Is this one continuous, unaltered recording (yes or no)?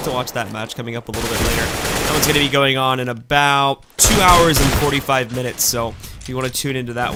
yes